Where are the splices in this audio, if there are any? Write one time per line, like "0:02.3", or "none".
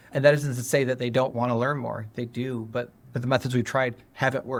none